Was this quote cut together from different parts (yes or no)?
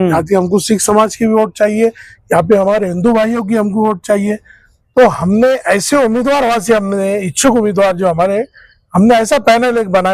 no